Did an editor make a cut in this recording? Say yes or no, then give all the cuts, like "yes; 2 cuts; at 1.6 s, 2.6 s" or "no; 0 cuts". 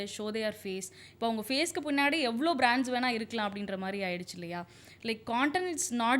no; 0 cuts